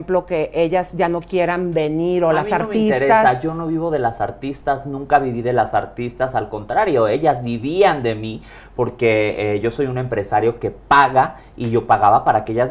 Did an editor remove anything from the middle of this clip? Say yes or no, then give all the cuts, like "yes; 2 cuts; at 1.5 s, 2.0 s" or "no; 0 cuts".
no; 0 cuts